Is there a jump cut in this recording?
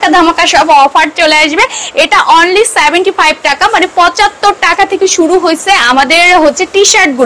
no; 0 cuts

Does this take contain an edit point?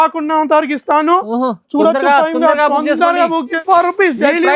yes; 1 cut; at 3.6 s

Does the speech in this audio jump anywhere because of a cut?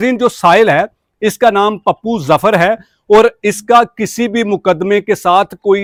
no; 0 cuts

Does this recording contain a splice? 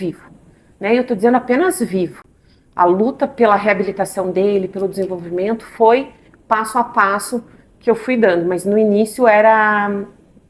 no; 0 cuts

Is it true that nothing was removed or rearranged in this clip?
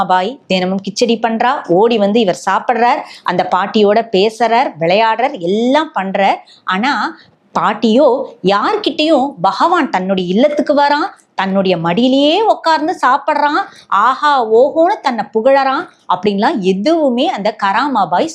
yes; 0 cuts

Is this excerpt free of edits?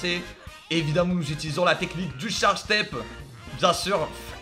yes; 0 cuts

